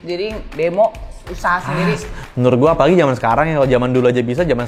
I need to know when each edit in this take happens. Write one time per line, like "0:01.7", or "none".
none